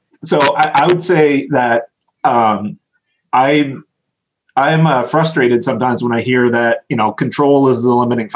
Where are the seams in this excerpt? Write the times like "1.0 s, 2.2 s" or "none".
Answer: none